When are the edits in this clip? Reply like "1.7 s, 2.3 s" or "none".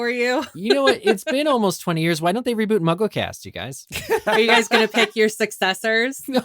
4.2 s